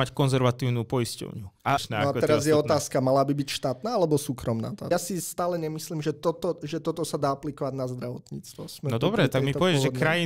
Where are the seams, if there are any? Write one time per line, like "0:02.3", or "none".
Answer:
0:01.8
0:04.9